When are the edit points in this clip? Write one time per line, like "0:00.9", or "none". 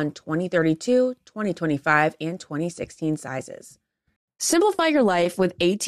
0:04.2

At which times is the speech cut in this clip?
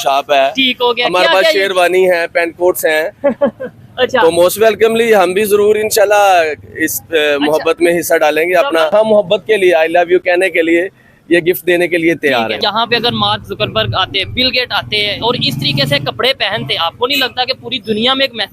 0:08.9
0:12.6

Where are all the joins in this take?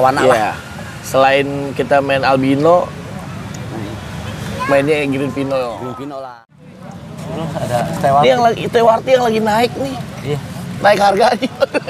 0:06.8

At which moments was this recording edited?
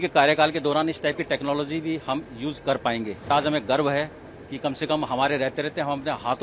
0:03.3

